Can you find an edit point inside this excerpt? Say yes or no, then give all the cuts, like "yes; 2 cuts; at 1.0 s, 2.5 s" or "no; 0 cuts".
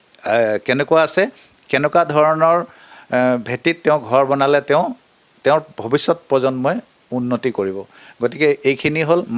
no; 0 cuts